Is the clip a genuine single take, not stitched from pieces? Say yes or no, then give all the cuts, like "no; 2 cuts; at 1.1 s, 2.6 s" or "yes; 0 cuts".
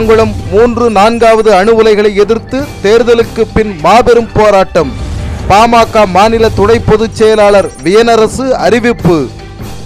yes; 0 cuts